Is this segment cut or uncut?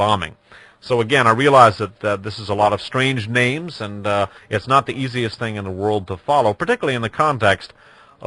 cut